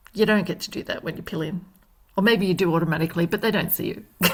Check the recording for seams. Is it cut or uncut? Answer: uncut